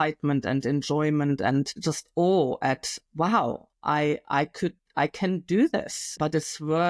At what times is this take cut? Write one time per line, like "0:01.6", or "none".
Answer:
0:06.0